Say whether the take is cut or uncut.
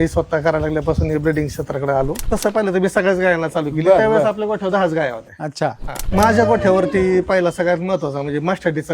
cut